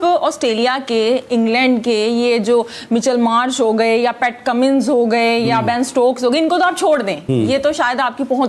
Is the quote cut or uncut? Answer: uncut